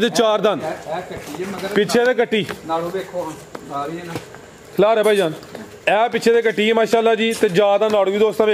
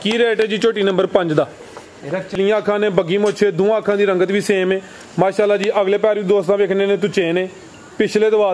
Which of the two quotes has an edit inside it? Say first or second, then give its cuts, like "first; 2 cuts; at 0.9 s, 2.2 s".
second; 1 cut; at 2.4 s